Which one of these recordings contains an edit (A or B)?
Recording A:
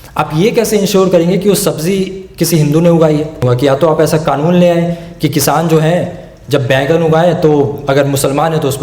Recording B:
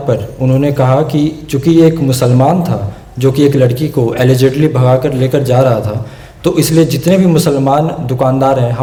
A